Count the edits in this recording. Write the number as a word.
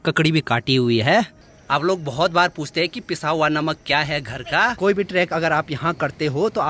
one